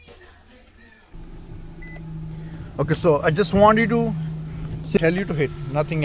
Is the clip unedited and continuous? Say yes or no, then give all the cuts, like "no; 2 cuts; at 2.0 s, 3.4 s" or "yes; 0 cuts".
no; 2 cuts; at 1.1 s, 5.0 s